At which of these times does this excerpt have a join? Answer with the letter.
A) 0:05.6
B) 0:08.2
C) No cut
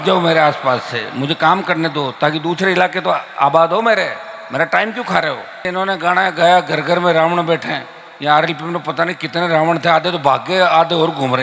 A